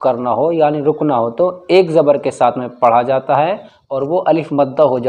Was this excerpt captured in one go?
yes; 0 cuts

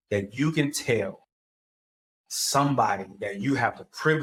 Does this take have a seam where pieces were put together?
no; 0 cuts

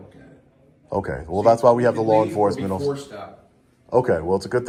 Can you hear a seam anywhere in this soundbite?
no; 0 cuts

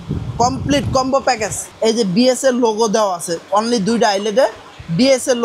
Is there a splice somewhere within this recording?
yes; 1 cut; at 1.6 s

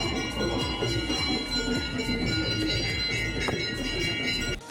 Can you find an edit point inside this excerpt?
no; 0 cuts

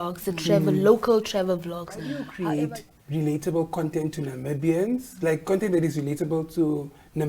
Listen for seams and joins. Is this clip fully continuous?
no; 1 cut; at 2.2 s

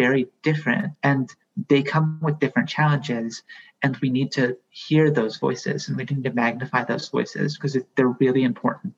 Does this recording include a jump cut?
yes; 1 cut; at 0.9 s

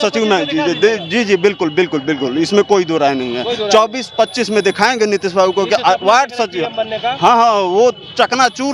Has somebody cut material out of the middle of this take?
no; 0 cuts

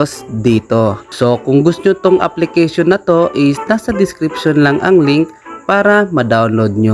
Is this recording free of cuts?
no; 1 cut; at 1.1 s

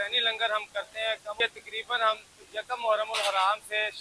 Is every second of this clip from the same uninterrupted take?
no; 1 cut; at 1.4 s

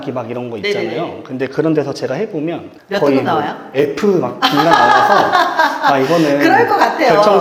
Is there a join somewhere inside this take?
no; 0 cuts

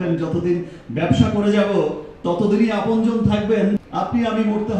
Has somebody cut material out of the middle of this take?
yes; 1 cut; at 3.8 s

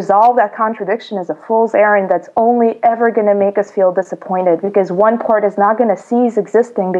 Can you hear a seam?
no; 0 cuts

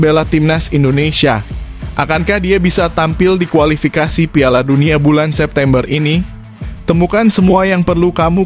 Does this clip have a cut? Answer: no; 0 cuts

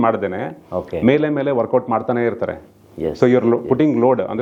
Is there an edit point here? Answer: no; 0 cuts

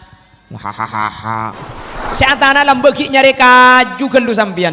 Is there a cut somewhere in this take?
yes; 1 cut; at 2.0 s

